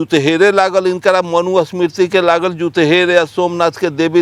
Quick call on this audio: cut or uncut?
uncut